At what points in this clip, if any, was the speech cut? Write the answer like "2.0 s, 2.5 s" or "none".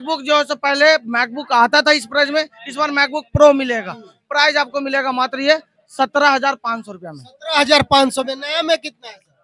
none